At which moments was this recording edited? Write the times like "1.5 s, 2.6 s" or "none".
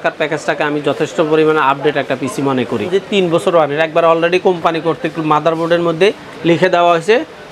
2.9 s